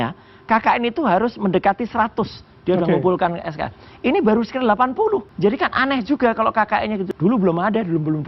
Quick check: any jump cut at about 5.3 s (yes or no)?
yes